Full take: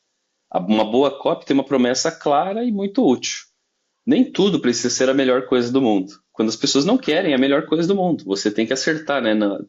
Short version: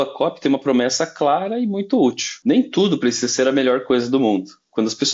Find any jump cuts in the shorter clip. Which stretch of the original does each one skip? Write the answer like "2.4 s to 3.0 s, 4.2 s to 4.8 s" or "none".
3.3 s to 3.9 s